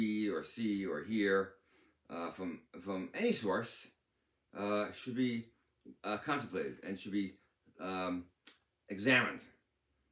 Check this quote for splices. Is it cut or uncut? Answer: uncut